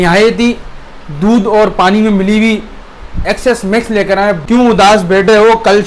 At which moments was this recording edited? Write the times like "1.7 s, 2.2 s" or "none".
4.4 s